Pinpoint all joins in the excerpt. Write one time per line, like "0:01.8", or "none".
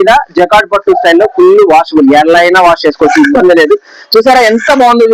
none